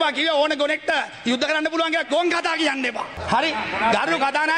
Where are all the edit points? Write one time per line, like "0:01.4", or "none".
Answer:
none